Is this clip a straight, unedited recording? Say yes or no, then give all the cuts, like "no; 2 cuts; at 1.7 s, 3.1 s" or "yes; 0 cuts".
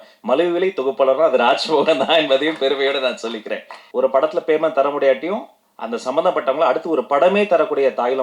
no; 1 cut; at 3.8 s